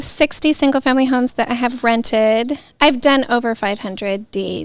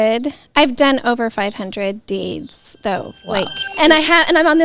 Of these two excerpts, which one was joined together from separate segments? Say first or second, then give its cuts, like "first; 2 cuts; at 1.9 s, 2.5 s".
second; 1 cut; at 3.6 s